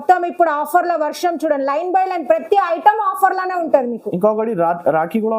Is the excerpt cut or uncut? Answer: uncut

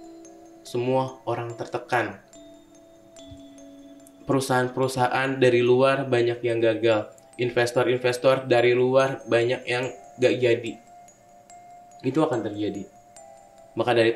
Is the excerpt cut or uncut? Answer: uncut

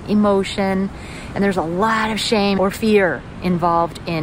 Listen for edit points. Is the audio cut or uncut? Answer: cut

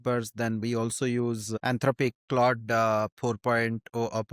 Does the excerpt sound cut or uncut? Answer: cut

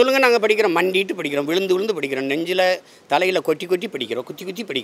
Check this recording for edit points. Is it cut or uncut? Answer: uncut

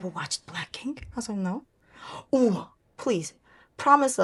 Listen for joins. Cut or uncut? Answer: uncut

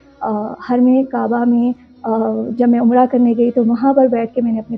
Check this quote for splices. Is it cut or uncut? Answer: uncut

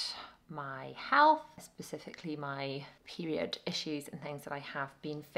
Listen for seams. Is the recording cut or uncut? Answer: uncut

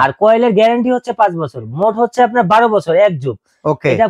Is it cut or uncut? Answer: uncut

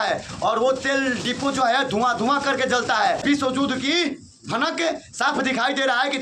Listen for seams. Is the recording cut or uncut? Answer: cut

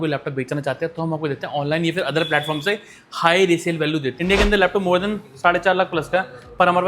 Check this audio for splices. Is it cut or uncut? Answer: cut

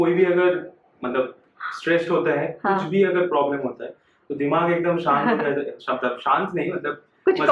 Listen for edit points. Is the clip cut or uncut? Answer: uncut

